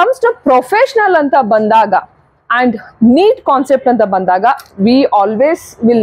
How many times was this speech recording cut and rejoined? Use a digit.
0